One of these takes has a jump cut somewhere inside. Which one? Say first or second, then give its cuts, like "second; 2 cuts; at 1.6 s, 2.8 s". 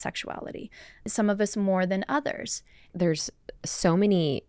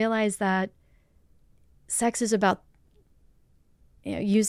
first; 2 cuts; at 1.1 s, 2.9 s